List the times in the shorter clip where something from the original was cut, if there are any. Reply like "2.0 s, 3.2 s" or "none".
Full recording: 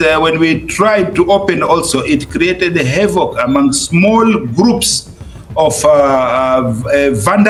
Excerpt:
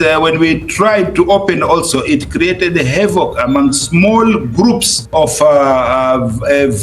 4.9 s